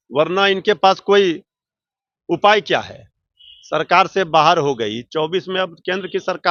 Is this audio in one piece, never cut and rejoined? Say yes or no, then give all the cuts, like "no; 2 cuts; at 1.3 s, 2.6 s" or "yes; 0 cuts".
yes; 0 cuts